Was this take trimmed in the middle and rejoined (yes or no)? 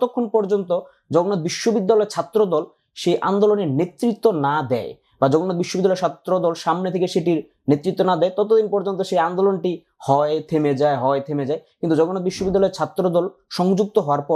no